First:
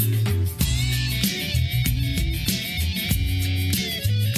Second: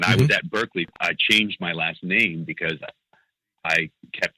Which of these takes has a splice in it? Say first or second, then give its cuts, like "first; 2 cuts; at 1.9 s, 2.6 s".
second; 1 cut; at 0.9 s